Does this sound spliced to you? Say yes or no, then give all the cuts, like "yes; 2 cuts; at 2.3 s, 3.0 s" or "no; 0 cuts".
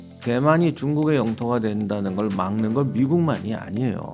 no; 0 cuts